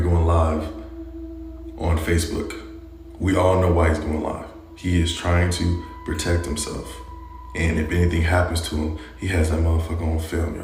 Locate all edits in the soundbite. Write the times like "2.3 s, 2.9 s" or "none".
none